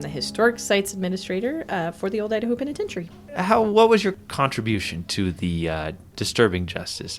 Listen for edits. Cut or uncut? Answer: uncut